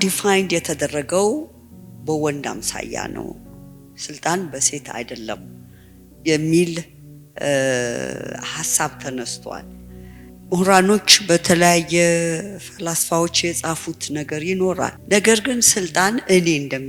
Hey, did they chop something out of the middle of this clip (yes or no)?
no